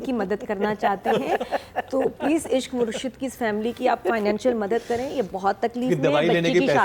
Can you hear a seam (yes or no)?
no